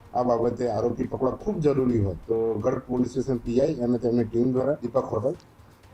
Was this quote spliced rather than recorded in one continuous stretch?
yes; 2 cuts; at 2.2 s, 4.8 s

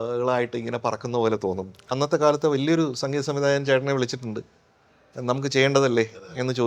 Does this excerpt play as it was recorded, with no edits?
no; 1 cut; at 1.8 s

